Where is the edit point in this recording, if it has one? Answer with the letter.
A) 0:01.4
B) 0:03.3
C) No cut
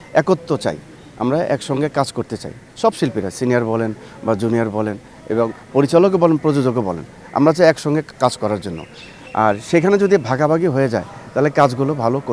C